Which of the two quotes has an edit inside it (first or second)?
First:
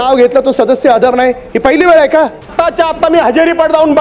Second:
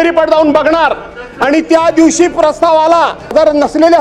first